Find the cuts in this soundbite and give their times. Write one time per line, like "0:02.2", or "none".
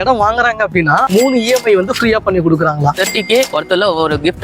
0:01.1
0:03.0